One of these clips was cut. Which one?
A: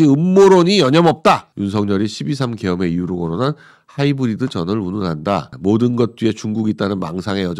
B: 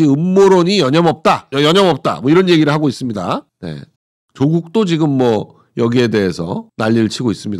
A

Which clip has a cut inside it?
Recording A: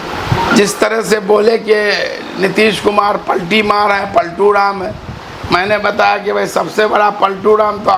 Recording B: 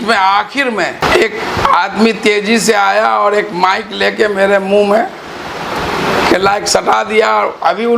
B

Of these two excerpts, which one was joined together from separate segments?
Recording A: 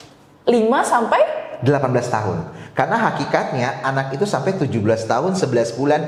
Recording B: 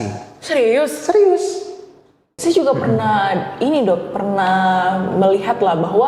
B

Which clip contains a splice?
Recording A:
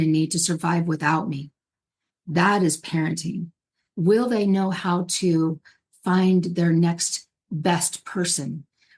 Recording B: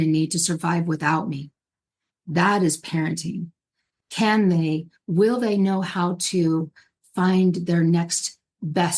A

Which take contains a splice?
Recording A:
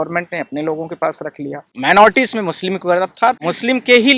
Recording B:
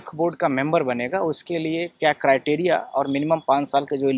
A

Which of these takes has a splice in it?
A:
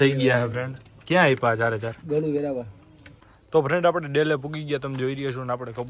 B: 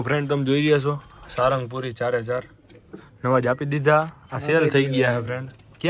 A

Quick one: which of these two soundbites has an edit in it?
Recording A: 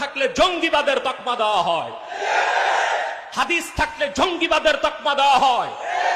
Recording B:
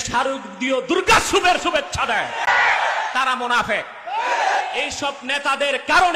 B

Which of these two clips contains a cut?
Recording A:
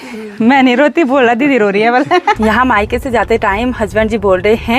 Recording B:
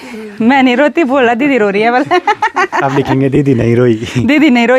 A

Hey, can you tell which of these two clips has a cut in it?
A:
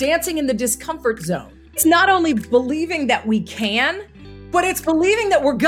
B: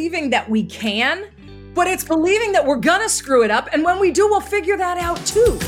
A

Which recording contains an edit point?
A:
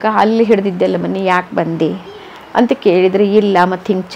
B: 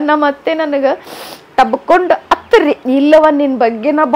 B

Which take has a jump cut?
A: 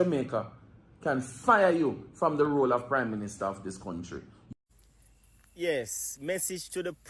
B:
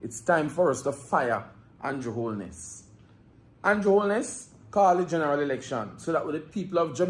A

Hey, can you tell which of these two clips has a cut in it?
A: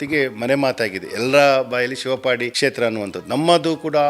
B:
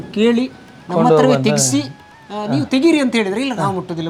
A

